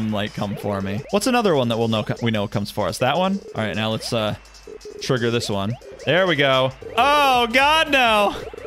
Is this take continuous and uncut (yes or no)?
no